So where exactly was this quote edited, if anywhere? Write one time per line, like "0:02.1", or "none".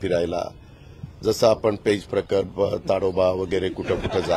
none

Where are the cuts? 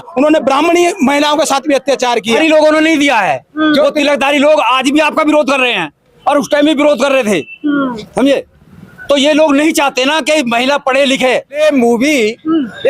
0:02.4
0:11.6

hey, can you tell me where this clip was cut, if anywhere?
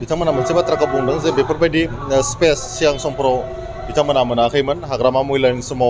none

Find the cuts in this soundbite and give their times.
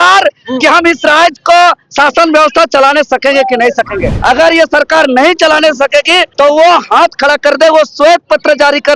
0:04.2
0:06.3

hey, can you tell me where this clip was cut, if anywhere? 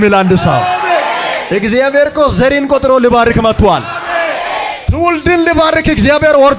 0:01.4
0:04.8

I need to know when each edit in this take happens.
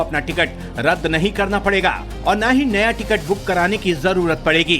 none

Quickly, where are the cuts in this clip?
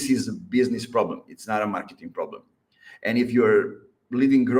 none

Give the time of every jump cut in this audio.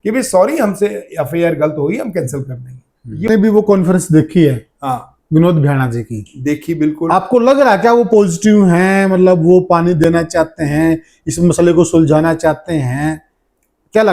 0:03.3

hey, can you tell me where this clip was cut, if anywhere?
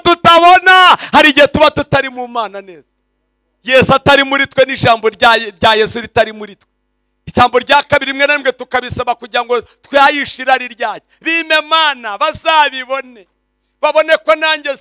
none

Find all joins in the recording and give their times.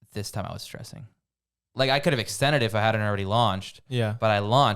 0:01.7

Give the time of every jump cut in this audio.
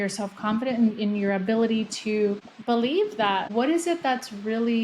0:03.5

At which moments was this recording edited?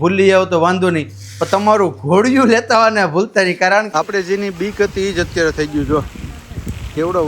0:03.9

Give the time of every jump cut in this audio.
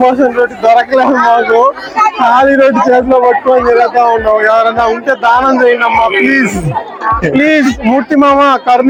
none

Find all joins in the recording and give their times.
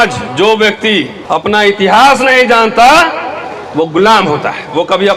0:01.2

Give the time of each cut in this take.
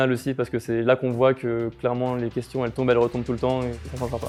none

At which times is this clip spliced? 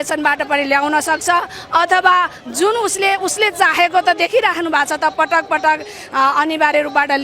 none

